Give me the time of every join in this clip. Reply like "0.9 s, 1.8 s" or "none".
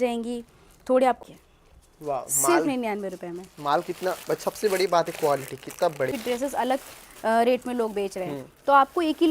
1.2 s, 6.1 s